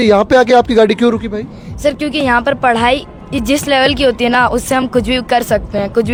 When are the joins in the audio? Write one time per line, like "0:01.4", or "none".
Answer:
none

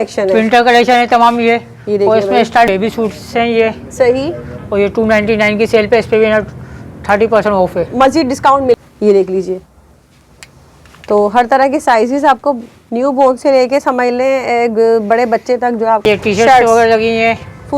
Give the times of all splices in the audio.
0:02.7
0:08.8
0:16.0

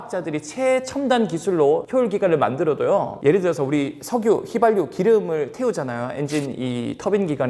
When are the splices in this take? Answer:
none

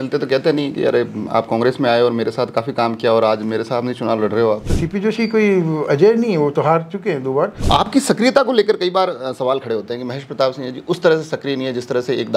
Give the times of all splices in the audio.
0:04.8
0:07.6

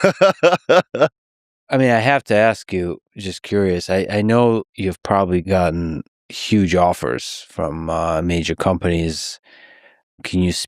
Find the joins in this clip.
0:01.2

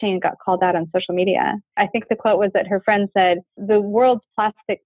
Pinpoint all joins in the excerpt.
0:01.7
0:03.6

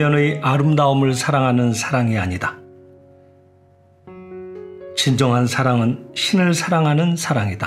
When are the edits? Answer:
0:02.5
0:04.7

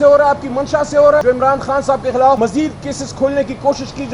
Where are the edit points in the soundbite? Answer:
0:01.2
0:02.4

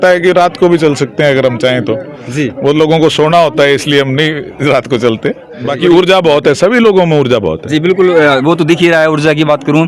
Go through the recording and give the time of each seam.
none

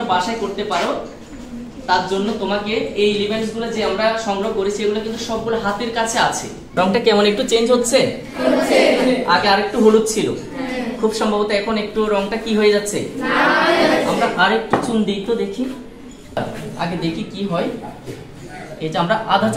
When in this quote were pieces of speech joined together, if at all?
0:06.7
0:16.4

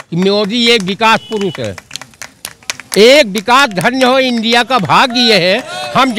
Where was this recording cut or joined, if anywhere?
none

